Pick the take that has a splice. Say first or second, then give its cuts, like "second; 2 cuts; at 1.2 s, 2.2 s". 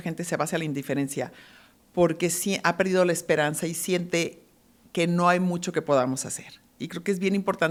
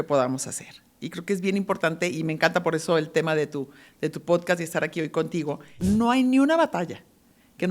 second; 1 cut; at 5.8 s